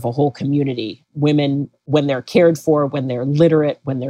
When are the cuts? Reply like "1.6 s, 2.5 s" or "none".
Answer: 1.7 s